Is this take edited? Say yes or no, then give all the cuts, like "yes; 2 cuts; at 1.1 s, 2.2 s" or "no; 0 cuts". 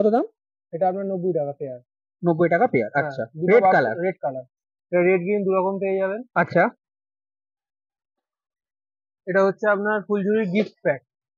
no; 0 cuts